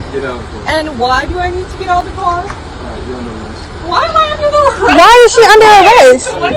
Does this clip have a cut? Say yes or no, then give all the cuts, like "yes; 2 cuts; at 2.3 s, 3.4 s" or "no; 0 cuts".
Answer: no; 0 cuts